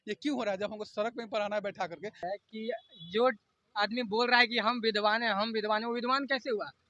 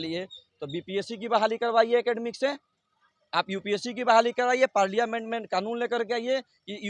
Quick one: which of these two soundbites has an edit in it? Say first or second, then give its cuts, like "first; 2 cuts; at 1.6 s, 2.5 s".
first; 1 cut; at 2.2 s